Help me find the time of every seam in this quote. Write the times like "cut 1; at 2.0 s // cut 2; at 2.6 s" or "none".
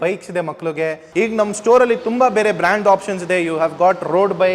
cut 1; at 1.0 s

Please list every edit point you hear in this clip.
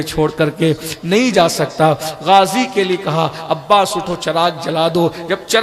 none

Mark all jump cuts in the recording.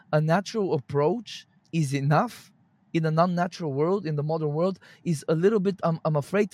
none

